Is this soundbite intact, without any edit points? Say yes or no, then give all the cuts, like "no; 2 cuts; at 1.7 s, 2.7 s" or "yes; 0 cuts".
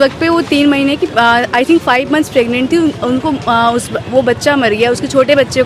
yes; 0 cuts